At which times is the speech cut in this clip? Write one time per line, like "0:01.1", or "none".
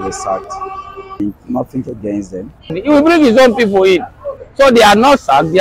0:01.2
0:02.7